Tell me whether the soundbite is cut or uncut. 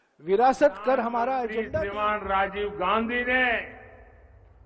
cut